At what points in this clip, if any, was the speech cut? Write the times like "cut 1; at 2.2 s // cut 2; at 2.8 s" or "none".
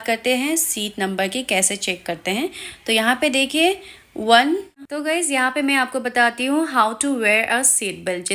cut 1; at 4.9 s